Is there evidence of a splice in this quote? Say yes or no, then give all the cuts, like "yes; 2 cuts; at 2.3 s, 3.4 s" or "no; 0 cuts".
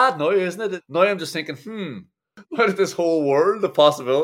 yes; 2 cuts; at 0.8 s, 2.4 s